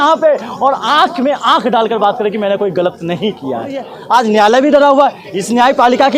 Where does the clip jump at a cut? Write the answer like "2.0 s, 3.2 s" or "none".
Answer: 3.9 s